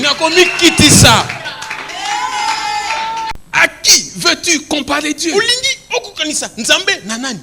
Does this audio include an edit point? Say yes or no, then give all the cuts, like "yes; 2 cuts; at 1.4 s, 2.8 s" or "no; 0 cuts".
yes; 1 cut; at 3.3 s